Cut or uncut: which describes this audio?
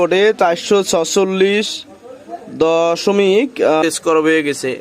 cut